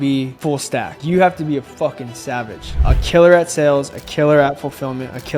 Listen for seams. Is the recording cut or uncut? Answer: cut